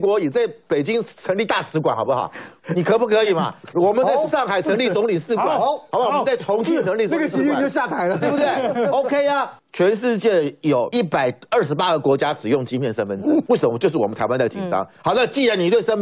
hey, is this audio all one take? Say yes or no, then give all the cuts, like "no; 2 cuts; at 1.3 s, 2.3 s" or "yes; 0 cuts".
no; 3 cuts; at 9.5 s, 10.9 s, 13.4 s